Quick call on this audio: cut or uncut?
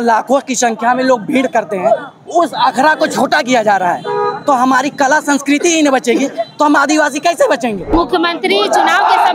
cut